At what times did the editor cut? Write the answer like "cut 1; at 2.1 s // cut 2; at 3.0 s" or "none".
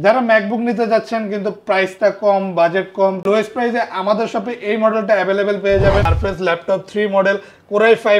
cut 1; at 3.2 s // cut 2; at 6.0 s